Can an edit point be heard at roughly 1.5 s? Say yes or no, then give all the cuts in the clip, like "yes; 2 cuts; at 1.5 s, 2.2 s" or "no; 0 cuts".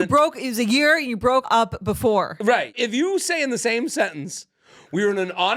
yes; 2 cuts; at 1.5 s, 2.8 s